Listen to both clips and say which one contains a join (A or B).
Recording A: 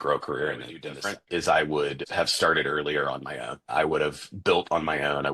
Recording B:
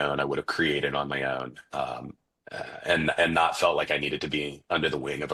A